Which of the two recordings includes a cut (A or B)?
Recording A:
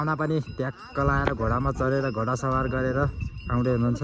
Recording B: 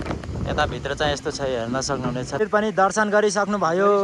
B